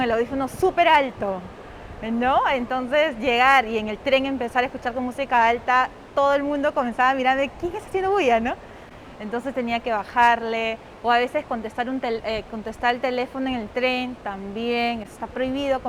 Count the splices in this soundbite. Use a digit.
0